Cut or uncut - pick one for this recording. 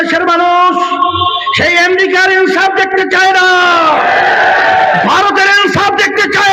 uncut